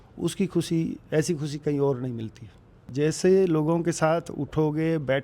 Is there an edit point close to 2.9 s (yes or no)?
yes